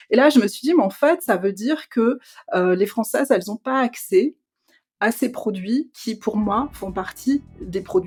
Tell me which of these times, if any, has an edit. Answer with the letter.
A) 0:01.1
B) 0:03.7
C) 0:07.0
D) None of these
D